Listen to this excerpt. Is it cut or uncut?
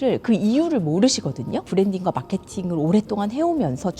cut